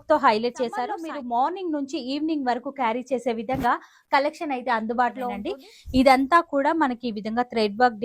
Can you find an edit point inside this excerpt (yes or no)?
yes